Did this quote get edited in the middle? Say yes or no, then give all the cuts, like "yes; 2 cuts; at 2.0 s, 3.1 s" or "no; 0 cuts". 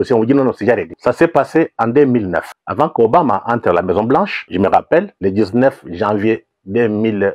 yes; 4 cuts; at 0.9 s, 2.6 s, 4.4 s, 5.1 s